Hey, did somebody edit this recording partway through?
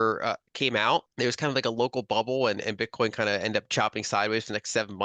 yes; 1 cut; at 1.1 s

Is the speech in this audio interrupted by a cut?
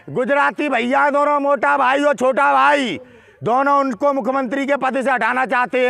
no; 0 cuts

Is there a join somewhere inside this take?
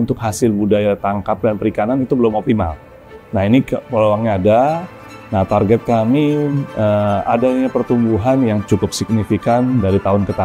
no; 0 cuts

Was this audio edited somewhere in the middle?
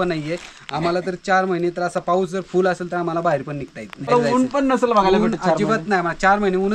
yes; 1 cut; at 4.1 s

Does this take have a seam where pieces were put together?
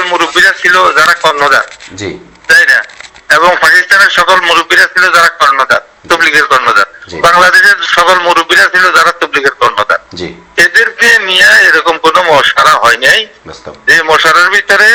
no; 0 cuts

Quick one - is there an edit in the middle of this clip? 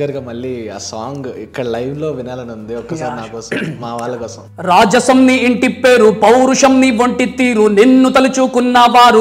yes; 1 cut; at 4.4 s

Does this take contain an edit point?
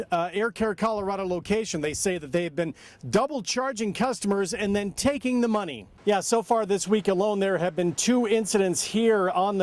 yes; 1 cut; at 5.8 s

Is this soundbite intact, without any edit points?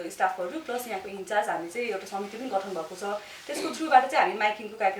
yes; 0 cuts

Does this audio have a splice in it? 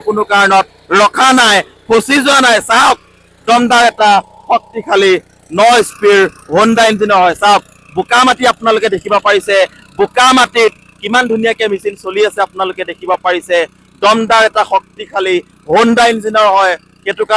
no; 0 cuts

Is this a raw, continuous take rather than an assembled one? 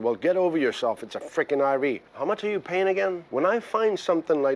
no; 2 cuts; at 2.1 s, 3.2 s

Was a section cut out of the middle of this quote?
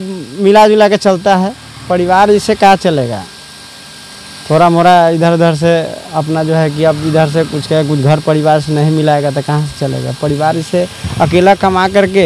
no; 0 cuts

